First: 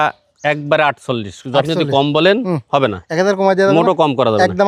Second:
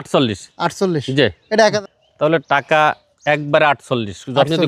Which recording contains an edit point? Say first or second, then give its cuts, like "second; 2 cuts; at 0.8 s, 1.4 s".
second; 1 cut; at 1.8 s